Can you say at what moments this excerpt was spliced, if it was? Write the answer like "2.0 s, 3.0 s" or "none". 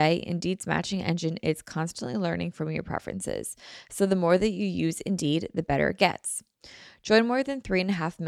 none